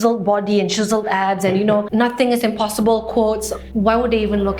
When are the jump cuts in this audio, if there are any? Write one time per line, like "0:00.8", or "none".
0:01.9
0:03.6